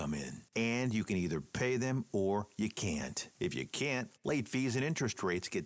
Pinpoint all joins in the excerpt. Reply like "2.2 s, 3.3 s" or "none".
none

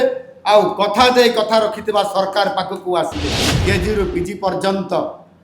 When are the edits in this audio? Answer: 3.5 s

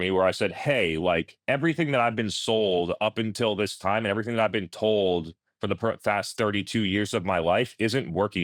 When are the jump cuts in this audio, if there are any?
none

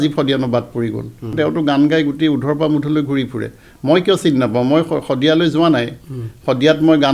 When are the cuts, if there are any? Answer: 1.3 s

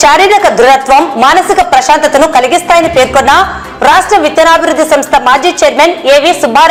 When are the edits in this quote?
none

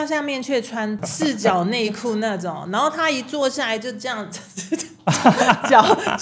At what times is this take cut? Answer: 1.0 s

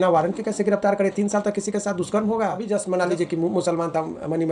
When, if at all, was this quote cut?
2.6 s

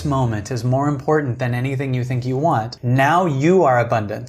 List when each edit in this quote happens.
2.8 s

